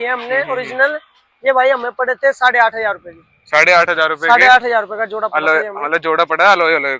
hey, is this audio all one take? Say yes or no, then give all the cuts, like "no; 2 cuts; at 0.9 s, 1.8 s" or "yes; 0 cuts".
yes; 0 cuts